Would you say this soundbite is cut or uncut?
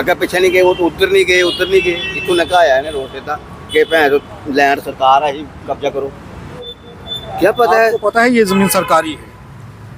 cut